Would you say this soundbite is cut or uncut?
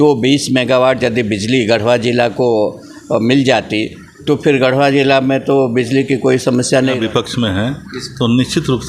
cut